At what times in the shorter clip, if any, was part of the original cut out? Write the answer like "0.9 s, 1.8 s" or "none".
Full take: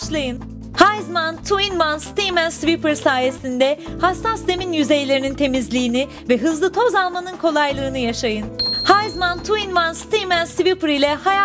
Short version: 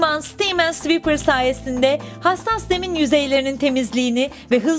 none

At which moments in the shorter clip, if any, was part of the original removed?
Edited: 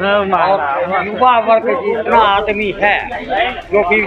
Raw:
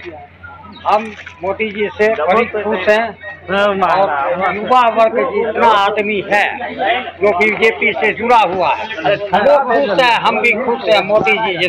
none

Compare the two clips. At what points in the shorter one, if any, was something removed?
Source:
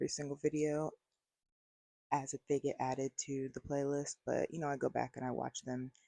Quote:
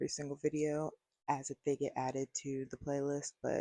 1.1 s

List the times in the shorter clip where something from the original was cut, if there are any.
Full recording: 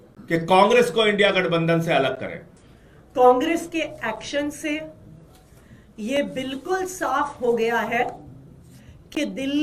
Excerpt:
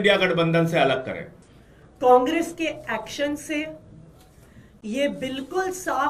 none

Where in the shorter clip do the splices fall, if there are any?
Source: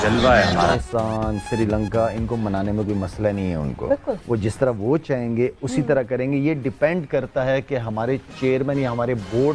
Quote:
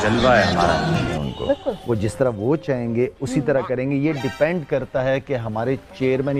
0.9 s

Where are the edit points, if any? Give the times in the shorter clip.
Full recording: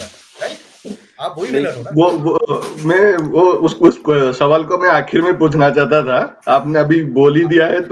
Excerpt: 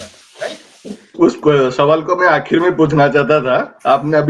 1.1 s

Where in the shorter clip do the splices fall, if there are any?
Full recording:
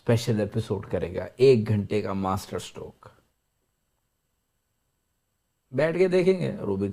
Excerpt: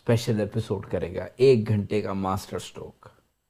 none

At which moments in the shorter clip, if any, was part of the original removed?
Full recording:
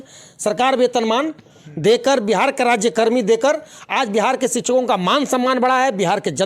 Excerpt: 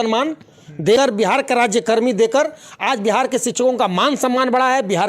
1.0 s

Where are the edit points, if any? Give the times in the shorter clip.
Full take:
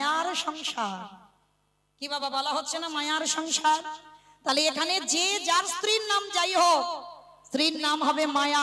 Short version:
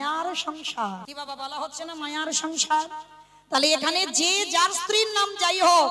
1.1 s

